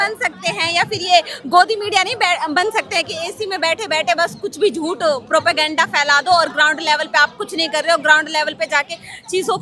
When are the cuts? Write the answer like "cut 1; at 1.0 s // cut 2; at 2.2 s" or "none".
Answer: none